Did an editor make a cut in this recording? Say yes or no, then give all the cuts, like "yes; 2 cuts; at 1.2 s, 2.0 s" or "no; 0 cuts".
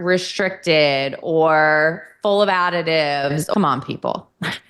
yes; 1 cut; at 3.5 s